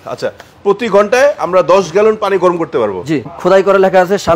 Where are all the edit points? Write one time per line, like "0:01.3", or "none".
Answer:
0:03.3